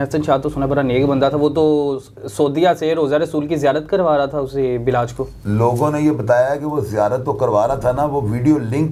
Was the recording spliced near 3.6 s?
no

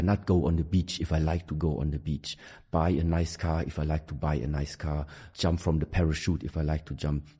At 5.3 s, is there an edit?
yes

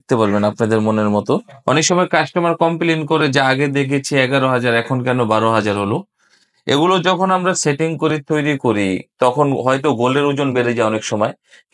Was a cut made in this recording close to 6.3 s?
no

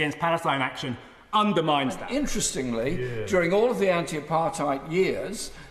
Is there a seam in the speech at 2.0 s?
yes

